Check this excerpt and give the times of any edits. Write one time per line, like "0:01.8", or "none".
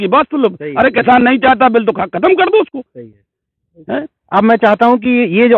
none